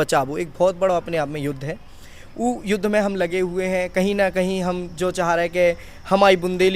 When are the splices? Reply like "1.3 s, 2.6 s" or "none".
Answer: none